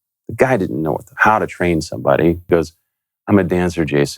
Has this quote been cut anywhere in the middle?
yes; 2 cuts; at 1.1 s, 2.5 s

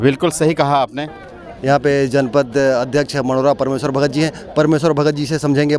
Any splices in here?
yes; 1 cut; at 0.9 s

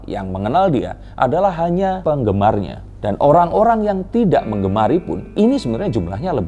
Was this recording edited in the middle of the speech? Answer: no; 0 cuts

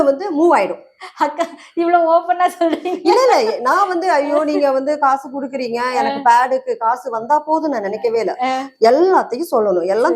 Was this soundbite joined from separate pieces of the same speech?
no; 0 cuts

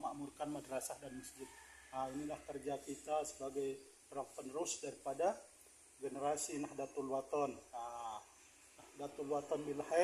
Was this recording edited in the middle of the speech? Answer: no; 0 cuts

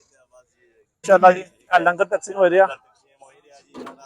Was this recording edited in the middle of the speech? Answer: yes; 1 cut; at 1.0 s

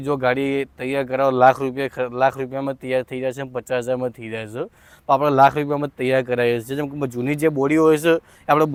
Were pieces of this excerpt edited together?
no; 0 cuts

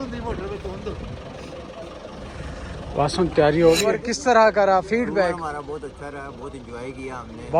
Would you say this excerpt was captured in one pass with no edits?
no; 1 cut; at 4.0 s

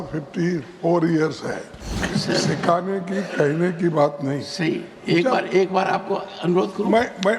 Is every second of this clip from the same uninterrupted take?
no; 1 cut; at 2.0 s

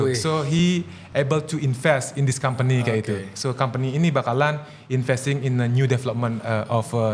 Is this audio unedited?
yes; 0 cuts

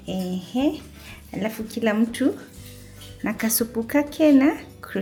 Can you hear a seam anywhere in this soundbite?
no; 0 cuts

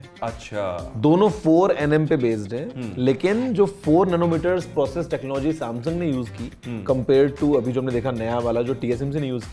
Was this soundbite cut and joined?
no; 0 cuts

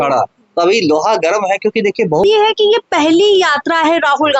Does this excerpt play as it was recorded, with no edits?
no; 1 cut; at 2.2 s

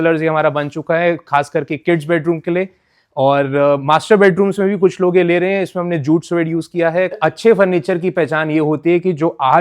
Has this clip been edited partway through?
yes; 1 cut; at 7.2 s

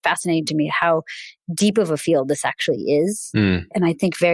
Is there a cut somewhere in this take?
no; 0 cuts

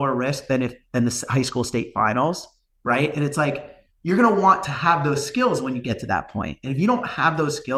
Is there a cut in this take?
no; 0 cuts

